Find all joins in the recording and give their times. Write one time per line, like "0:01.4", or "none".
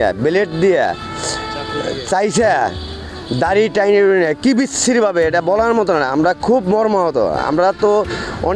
none